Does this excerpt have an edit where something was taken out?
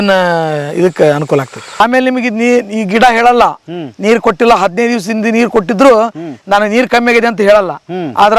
yes; 1 cut; at 1.8 s

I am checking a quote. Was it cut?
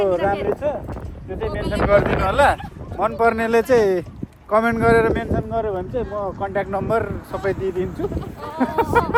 no; 0 cuts

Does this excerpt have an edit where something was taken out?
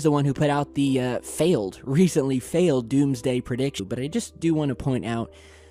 no; 0 cuts

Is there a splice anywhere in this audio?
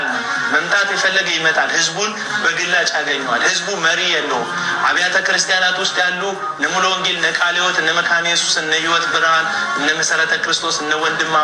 no; 0 cuts

